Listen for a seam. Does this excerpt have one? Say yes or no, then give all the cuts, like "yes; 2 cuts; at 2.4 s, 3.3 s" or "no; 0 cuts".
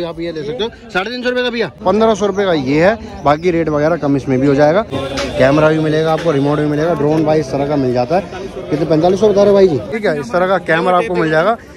yes; 3 cuts; at 1.7 s, 5.0 s, 10.0 s